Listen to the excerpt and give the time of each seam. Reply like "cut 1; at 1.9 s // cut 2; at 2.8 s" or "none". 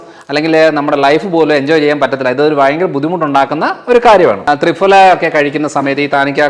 cut 1; at 4.4 s

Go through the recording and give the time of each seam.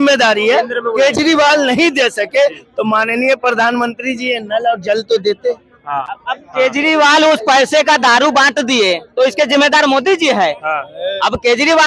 none

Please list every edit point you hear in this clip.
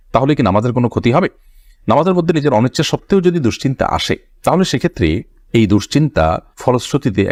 none

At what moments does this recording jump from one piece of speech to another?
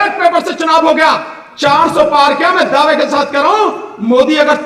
none

